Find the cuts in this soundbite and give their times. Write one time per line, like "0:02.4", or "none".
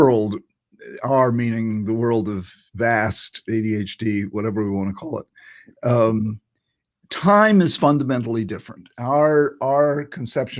none